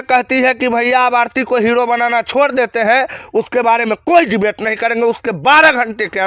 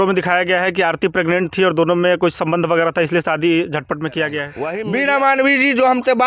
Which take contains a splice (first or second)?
second